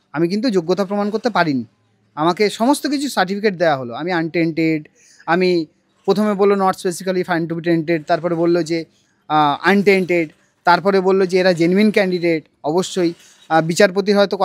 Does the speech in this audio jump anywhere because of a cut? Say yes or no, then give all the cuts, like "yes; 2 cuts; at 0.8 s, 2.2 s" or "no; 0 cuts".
no; 0 cuts